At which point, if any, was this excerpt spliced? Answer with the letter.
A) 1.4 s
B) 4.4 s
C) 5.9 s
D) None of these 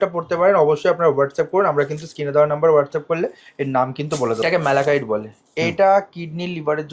B